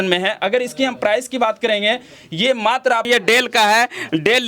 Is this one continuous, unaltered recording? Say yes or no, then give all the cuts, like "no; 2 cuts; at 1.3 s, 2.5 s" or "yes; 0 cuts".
no; 1 cut; at 3.1 s